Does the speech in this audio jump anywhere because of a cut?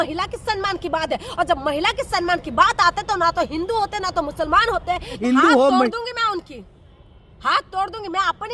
yes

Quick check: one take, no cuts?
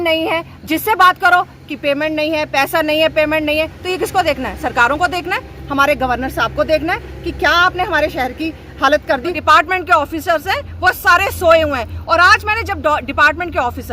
no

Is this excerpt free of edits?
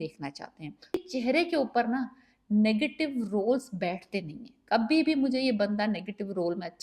no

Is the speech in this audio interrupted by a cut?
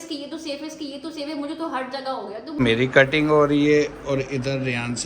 yes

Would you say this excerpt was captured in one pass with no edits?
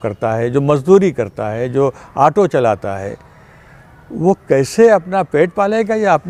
yes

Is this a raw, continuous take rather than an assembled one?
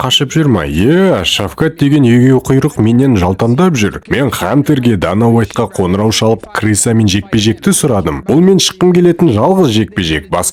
yes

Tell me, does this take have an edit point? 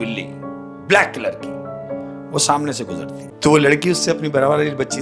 yes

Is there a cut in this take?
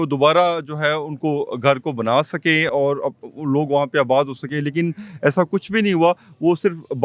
no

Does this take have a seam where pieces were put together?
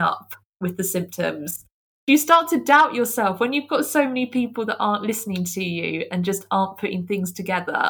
yes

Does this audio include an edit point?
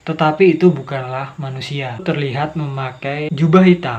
yes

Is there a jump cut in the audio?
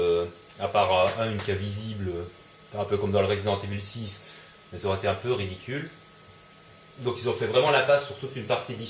yes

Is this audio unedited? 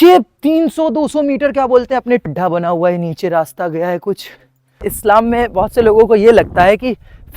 no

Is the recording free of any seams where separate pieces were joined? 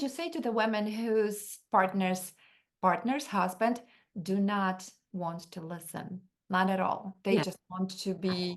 yes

